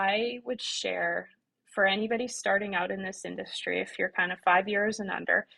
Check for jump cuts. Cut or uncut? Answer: uncut